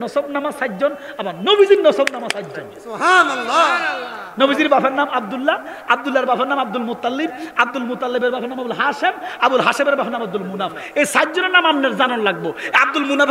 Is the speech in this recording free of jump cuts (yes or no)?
yes